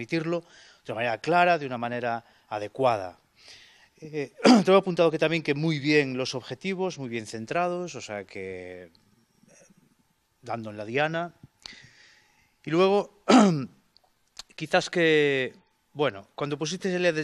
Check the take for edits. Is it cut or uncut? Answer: cut